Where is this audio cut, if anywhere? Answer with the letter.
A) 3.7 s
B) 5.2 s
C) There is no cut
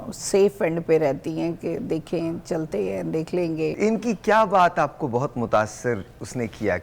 A